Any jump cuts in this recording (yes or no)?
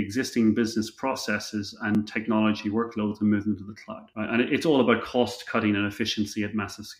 no